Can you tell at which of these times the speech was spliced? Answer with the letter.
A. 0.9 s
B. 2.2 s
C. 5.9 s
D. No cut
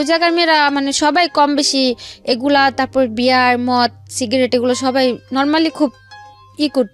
D